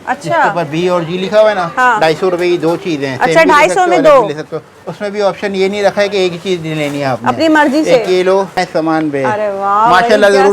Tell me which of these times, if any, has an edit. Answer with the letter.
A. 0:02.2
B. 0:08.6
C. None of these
B